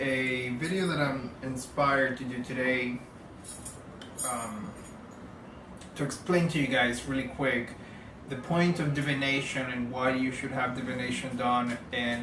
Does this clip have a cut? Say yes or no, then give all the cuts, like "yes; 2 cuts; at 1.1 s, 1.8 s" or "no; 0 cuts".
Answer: no; 0 cuts